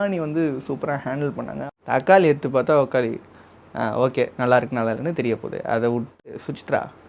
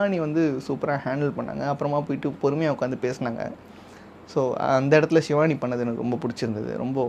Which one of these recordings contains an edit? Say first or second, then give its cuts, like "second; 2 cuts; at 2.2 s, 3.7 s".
first; 2 cuts; at 1.6 s, 6.2 s